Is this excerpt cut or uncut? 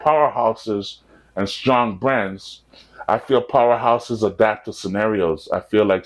uncut